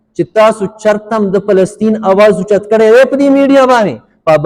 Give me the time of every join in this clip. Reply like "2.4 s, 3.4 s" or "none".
none